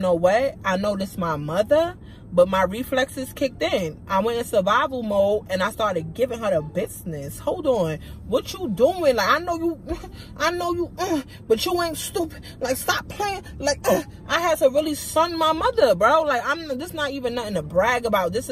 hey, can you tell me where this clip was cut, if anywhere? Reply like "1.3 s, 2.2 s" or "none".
none